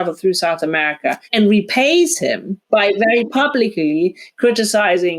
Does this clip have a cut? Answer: yes; 2 cuts; at 1.2 s, 2.5 s

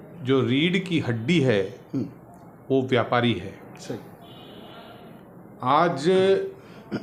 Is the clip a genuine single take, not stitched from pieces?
yes; 0 cuts

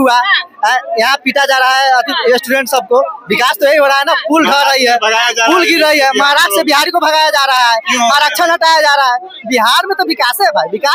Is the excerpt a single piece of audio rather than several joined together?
yes; 0 cuts

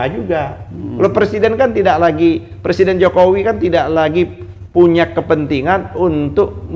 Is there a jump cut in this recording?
no; 0 cuts

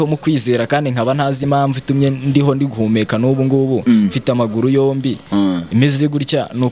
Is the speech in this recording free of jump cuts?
yes; 0 cuts

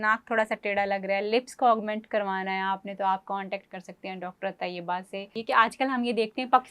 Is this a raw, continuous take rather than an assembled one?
no; 1 cut; at 5.4 s

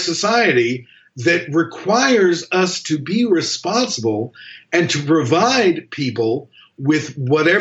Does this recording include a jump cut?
no; 0 cuts

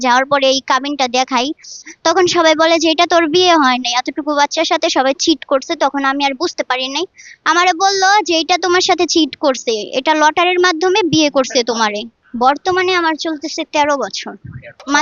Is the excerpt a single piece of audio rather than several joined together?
yes; 0 cuts

